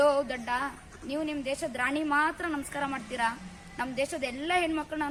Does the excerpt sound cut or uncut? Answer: uncut